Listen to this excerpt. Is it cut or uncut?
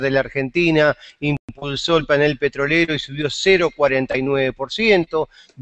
uncut